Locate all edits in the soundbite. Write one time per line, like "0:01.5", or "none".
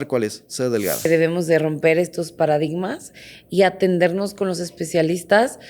0:01.1